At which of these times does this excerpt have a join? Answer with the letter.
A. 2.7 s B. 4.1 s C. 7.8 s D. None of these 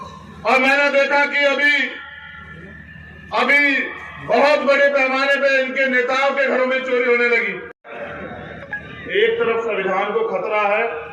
C